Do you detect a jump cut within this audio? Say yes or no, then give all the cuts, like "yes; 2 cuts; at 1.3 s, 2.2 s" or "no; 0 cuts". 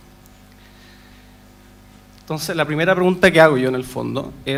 no; 0 cuts